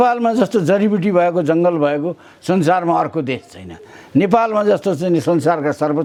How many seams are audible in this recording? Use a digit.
0